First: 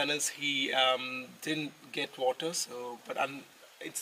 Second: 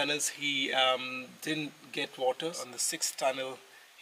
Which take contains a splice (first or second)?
second